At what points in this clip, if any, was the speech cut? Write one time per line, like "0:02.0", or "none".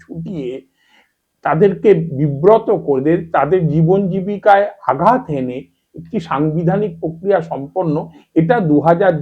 none